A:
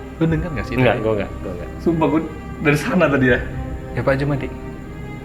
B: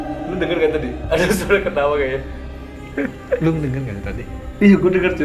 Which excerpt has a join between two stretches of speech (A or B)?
B